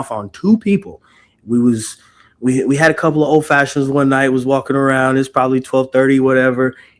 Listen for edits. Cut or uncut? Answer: uncut